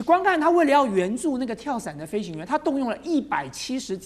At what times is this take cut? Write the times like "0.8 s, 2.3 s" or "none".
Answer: none